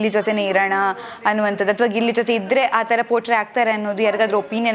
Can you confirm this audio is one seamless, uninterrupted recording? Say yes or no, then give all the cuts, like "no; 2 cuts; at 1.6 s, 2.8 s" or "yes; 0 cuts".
yes; 0 cuts